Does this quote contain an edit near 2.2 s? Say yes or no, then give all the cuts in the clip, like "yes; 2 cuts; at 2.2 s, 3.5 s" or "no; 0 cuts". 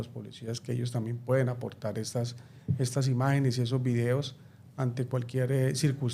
no; 0 cuts